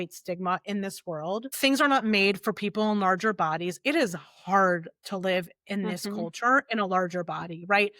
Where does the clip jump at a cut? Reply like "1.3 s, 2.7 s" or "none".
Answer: 1.5 s